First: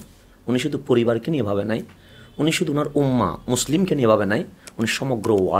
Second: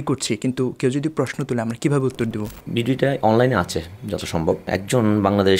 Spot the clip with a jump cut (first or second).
second